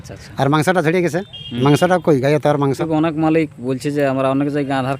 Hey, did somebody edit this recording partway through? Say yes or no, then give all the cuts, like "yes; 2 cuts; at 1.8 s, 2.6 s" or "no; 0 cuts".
yes; 1 cut; at 2.8 s